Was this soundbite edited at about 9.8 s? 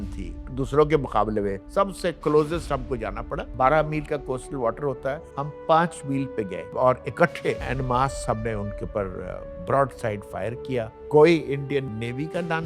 no; 4 cuts; at 1.6 s, 6.7 s, 7.6 s, 11.0 s

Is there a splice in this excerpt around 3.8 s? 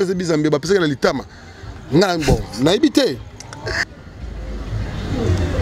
yes; 1 cut; at 3.8 s

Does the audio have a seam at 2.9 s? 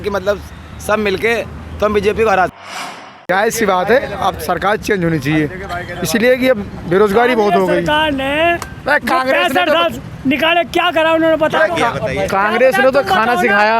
yes; 1 cut; at 2.9 s

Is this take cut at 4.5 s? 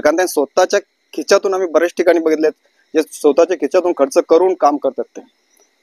no; 0 cuts

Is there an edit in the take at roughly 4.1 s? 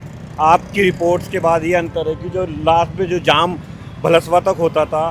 no; 0 cuts

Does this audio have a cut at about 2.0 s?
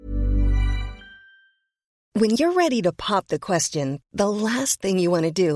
yes; 1 cut; at 2.0 s

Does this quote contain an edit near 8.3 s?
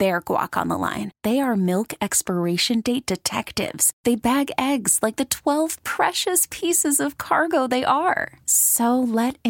no; 0 cuts

